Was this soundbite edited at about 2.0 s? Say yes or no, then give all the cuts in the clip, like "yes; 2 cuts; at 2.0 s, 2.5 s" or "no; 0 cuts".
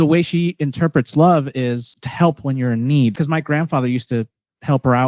yes; 2 cuts; at 2.0 s, 3.2 s